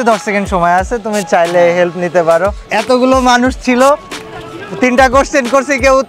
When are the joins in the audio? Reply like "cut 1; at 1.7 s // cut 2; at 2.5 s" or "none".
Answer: cut 1; at 2.6 s